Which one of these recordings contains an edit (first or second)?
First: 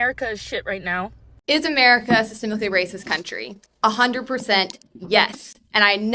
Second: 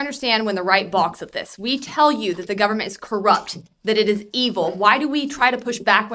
first